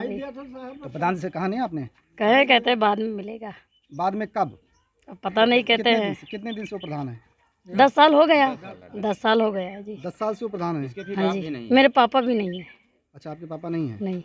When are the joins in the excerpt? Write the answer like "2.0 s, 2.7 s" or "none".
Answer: none